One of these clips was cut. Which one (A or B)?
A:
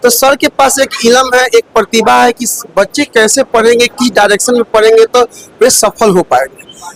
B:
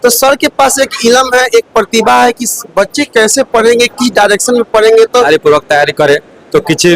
B